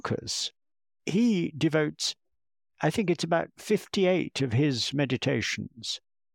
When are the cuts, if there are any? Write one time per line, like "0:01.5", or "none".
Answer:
0:00.9